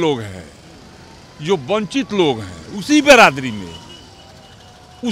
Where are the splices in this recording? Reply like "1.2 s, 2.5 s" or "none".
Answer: none